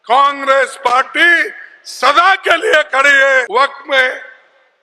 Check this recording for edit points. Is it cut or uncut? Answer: cut